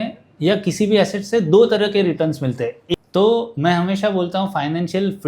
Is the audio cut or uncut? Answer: cut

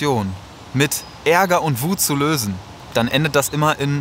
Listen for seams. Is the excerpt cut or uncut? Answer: cut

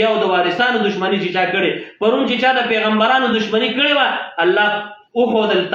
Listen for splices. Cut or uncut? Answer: uncut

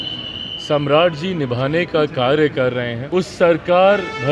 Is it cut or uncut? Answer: cut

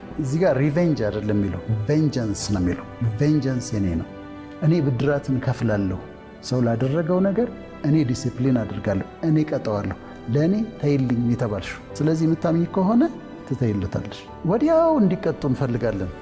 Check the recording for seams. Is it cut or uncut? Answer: uncut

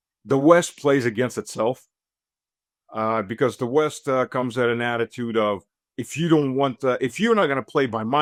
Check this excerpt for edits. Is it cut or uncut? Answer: uncut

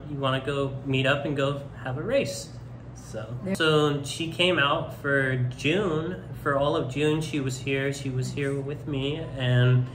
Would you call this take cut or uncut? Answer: cut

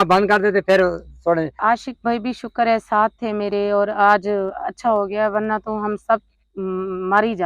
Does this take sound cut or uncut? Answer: cut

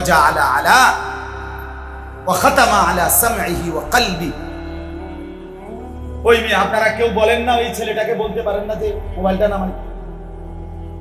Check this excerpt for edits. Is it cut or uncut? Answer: cut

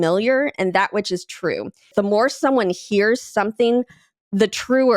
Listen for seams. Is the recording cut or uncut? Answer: cut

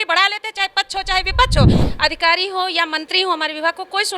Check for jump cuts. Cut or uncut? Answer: cut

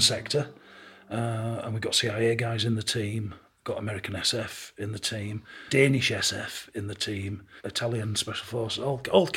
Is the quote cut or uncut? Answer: cut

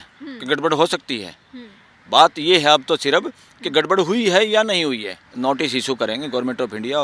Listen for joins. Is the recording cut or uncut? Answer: cut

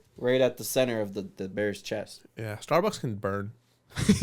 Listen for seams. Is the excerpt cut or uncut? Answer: uncut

